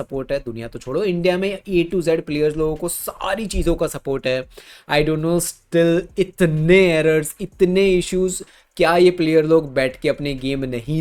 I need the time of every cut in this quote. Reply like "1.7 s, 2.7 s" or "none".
none

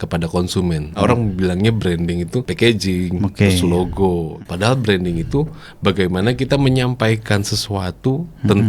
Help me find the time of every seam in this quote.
1.0 s, 2.5 s, 4.3 s

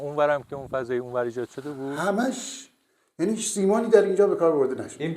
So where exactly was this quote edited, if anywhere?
2.0 s

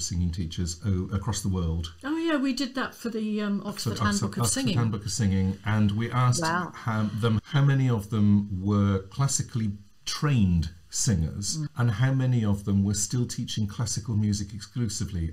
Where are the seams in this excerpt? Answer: 7.4 s, 11.7 s

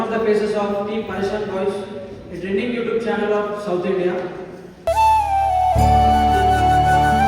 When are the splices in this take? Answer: none

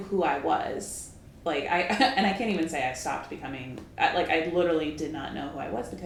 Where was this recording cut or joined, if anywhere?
none

